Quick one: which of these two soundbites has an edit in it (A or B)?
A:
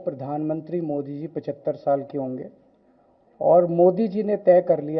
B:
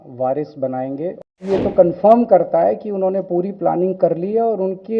B